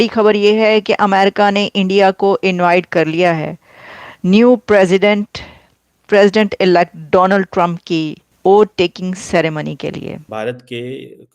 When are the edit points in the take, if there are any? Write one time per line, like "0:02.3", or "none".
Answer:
0:08.2
0:10.3